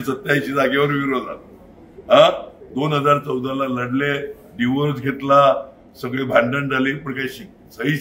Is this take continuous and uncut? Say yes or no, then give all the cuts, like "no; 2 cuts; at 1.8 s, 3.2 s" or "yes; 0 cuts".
yes; 0 cuts